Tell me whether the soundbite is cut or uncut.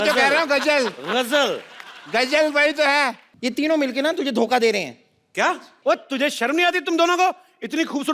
cut